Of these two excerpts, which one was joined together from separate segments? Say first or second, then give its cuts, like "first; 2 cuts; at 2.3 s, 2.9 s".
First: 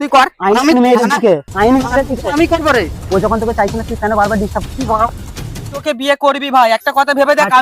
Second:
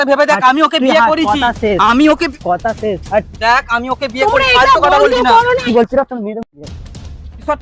first; 1 cut; at 5.8 s